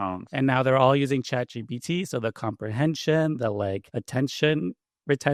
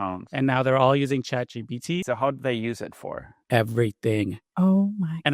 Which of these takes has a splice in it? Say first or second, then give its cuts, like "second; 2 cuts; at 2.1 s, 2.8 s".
second; 2 cuts; at 2.0 s, 4.4 s